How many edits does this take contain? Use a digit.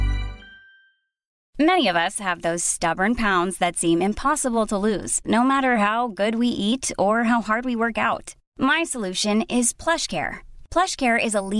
1